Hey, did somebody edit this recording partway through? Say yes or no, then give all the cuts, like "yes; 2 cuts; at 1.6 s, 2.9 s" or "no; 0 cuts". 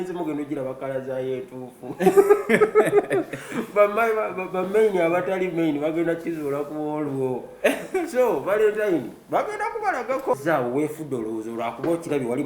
yes; 1 cut; at 10.4 s